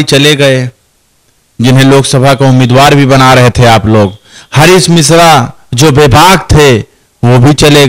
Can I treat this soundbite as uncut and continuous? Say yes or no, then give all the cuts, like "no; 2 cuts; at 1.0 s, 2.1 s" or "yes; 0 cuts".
yes; 0 cuts